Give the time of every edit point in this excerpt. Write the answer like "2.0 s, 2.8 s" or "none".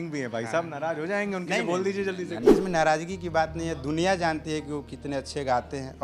2.5 s